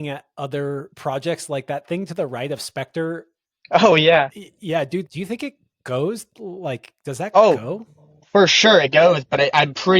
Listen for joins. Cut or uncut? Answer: cut